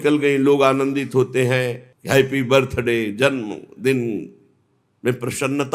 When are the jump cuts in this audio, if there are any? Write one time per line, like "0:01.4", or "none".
none